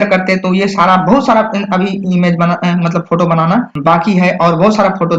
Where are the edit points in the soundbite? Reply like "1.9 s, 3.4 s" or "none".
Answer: 3.7 s